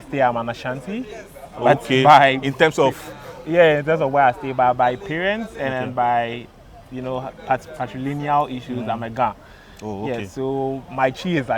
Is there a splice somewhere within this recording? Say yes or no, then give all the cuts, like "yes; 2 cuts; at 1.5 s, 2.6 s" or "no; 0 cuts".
no; 0 cuts